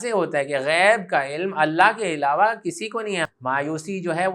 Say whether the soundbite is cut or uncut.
cut